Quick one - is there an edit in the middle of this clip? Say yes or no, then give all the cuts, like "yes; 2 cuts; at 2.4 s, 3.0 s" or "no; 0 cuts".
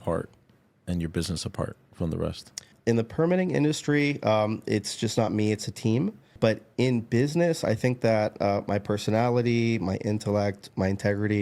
yes; 2 cuts; at 2.7 s, 6.3 s